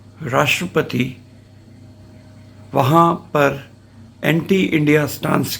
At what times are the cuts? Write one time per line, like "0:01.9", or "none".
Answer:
none